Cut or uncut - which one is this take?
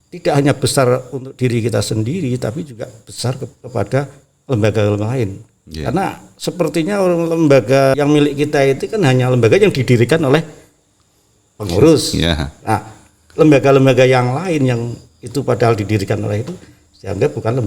cut